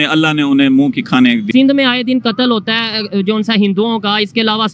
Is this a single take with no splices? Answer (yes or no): no